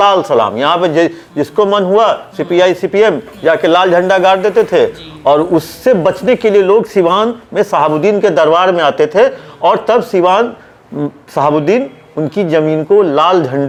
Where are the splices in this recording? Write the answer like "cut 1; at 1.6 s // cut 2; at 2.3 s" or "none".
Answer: none

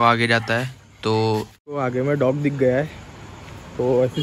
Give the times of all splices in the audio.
cut 1; at 1.6 s

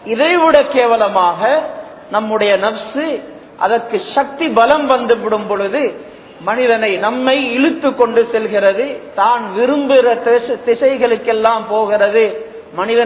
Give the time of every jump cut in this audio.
none

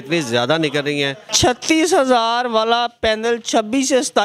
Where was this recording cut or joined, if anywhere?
cut 1; at 1.3 s

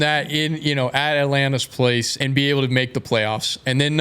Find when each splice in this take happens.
cut 1; at 2.1 s

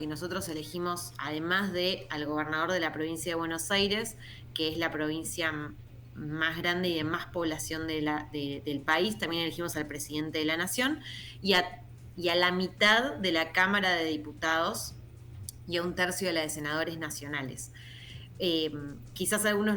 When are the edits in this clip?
none

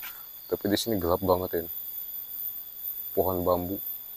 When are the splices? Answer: none

